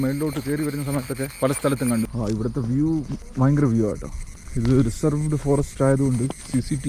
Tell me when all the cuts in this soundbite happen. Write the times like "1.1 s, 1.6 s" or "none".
2.1 s